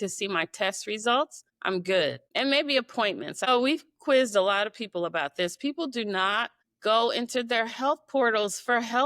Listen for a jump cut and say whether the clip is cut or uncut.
cut